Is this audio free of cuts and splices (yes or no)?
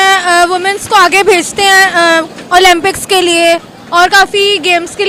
yes